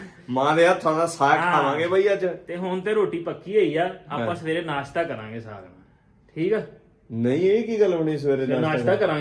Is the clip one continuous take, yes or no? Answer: yes